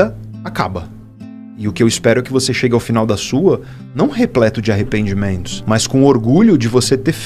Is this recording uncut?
no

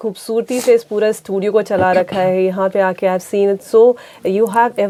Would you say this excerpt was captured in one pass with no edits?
yes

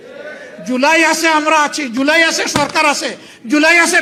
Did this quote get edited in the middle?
no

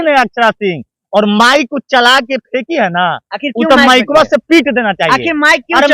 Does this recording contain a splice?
no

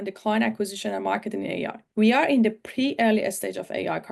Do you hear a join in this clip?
yes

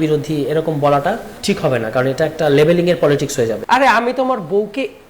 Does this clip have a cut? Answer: yes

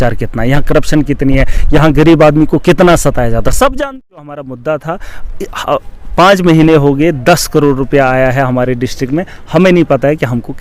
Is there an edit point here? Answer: yes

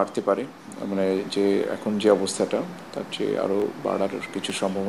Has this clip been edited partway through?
no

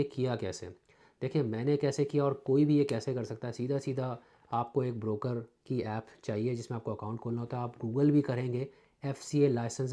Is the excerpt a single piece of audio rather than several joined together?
yes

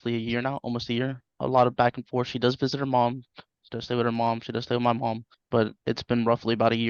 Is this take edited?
yes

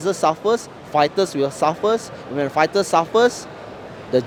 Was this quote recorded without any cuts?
yes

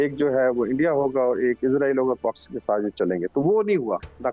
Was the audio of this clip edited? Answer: no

